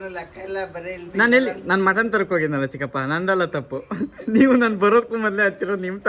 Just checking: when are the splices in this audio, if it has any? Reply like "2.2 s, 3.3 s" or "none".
none